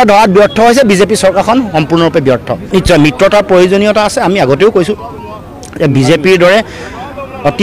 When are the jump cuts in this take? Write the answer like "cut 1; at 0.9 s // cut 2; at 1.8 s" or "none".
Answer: none